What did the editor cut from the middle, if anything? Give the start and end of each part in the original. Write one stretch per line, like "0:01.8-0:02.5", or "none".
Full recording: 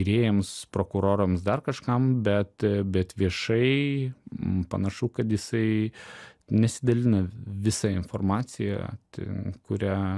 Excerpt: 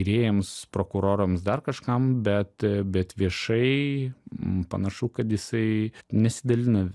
0:06.0-0:06.4